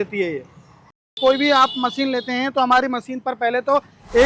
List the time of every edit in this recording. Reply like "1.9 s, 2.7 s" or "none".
1.0 s